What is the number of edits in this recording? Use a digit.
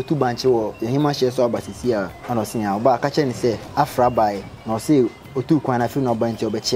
3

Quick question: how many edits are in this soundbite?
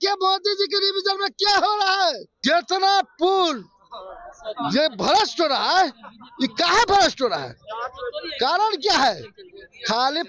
1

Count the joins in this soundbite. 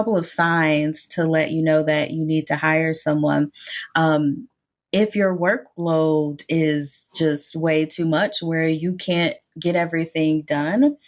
0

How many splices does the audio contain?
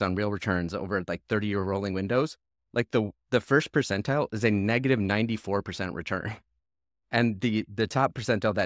0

